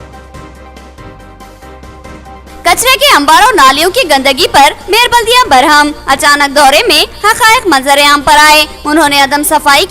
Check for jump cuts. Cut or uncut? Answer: cut